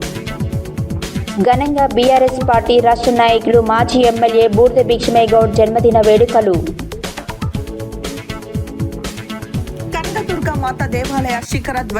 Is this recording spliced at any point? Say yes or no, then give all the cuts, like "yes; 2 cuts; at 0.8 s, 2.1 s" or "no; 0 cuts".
yes; 1 cut; at 1.2 s